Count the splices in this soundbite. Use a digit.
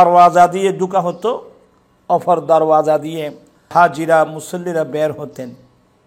1